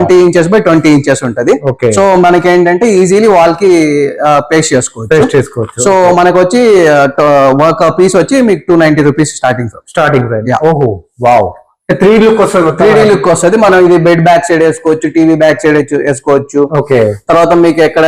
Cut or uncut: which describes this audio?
uncut